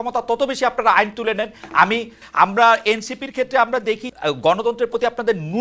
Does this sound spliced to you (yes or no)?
yes